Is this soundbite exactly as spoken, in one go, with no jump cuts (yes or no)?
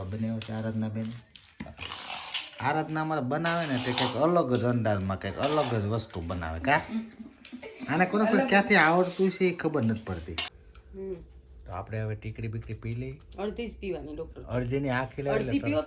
no